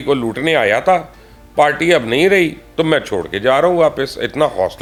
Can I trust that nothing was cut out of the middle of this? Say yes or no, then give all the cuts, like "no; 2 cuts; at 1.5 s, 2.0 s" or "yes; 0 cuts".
yes; 0 cuts